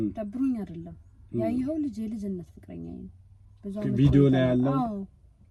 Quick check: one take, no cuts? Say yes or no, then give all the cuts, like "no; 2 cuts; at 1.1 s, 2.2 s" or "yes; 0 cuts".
yes; 0 cuts